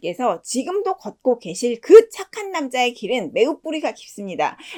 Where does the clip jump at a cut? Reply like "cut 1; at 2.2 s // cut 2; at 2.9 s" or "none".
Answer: none